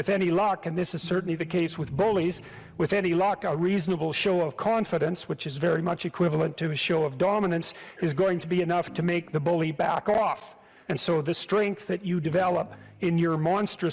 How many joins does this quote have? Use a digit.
2